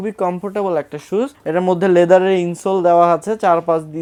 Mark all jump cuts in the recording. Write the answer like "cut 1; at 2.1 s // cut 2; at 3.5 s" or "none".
none